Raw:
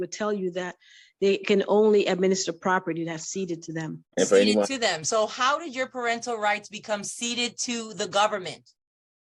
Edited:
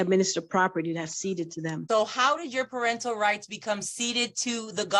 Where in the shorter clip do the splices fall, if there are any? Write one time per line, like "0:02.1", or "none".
0:01.8